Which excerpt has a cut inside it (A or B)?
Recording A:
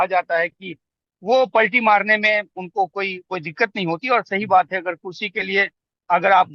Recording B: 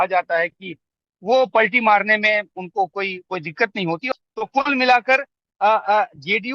B